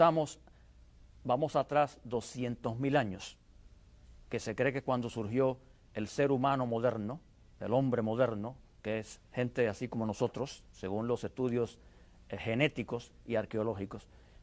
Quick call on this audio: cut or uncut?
cut